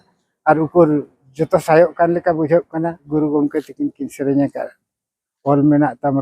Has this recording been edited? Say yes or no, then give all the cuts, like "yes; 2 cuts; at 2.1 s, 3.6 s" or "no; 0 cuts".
yes; 1 cut; at 3.0 s